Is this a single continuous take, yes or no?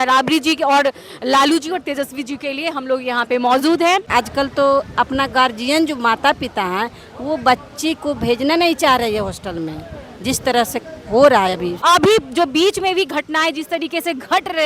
no